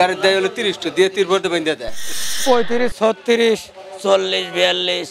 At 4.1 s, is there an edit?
no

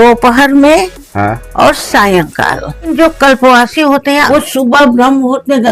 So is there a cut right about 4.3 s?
yes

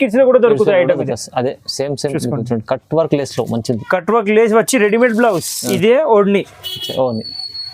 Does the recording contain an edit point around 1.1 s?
no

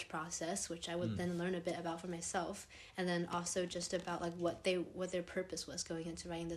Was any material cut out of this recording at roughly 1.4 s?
no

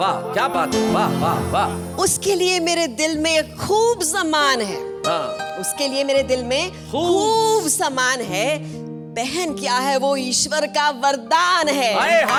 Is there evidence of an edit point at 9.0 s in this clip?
no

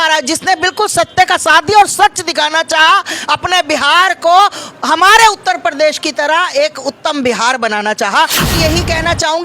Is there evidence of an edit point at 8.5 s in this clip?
yes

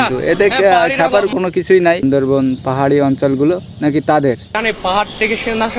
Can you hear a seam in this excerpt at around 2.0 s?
yes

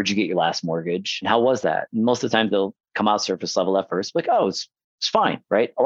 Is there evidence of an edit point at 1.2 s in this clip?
yes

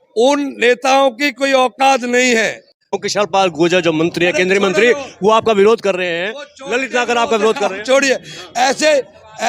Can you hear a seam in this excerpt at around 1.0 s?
no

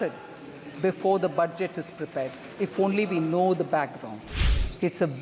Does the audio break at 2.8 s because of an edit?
no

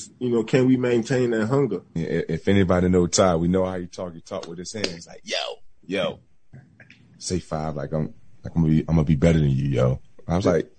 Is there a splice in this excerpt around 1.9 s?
yes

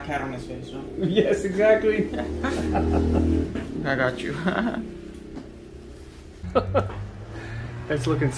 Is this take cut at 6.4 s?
yes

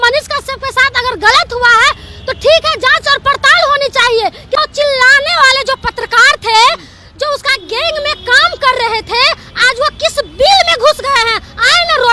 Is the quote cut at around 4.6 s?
yes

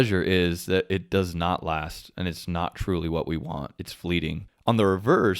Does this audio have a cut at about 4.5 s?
yes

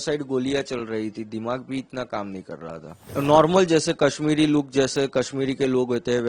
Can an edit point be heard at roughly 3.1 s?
yes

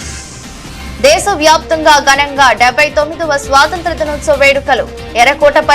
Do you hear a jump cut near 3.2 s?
no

